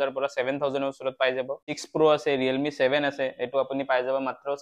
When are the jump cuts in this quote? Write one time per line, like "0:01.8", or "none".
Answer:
0:01.7